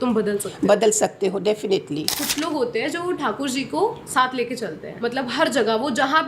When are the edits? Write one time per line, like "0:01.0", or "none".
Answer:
0:02.2
0:04.9